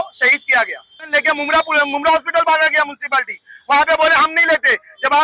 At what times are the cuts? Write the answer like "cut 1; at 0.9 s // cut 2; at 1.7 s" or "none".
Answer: cut 1; at 1.1 s

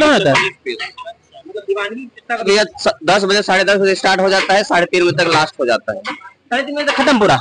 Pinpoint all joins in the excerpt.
cut 1; at 2.5 s

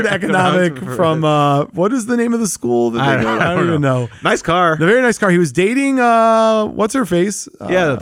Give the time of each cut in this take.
none

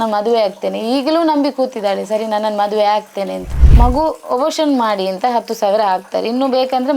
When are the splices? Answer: cut 1; at 3.5 s

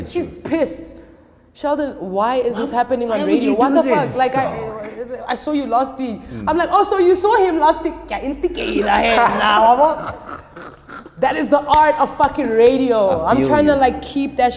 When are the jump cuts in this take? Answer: none

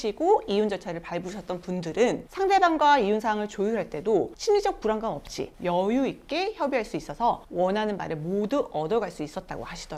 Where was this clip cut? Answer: none

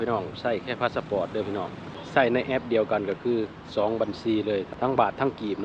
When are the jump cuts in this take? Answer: cut 1; at 2.0 s // cut 2; at 4.7 s

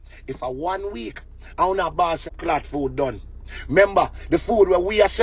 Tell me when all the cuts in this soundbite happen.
cut 1; at 2.3 s

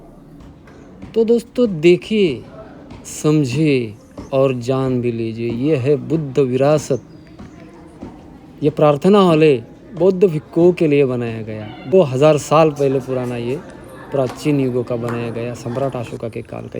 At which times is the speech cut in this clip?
cut 1; at 11.9 s

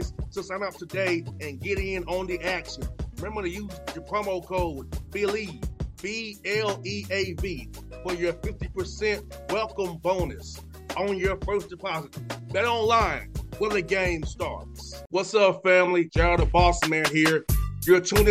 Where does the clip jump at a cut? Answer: none

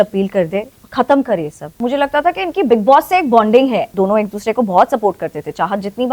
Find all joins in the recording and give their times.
cut 1; at 1.7 s // cut 2; at 3.9 s

